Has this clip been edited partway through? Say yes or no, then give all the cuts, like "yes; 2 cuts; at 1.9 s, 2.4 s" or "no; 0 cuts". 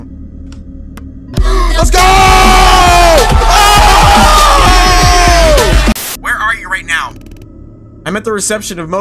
yes; 1 cut; at 6.1 s